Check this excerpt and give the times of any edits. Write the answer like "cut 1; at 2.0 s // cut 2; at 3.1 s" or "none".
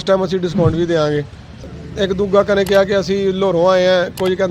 cut 1; at 1.8 s